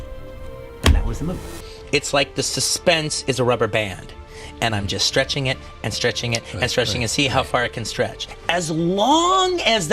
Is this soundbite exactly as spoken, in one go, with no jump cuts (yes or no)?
no